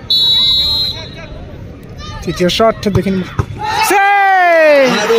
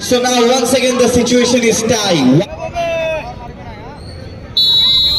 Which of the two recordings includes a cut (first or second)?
second